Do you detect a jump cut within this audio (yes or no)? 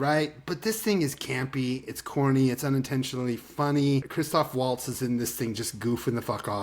yes